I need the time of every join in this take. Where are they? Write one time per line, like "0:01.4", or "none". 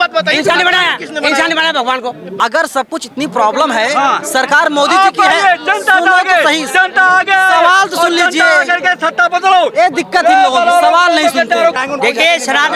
0:02.3
0:11.8